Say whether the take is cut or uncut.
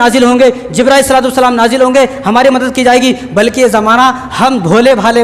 uncut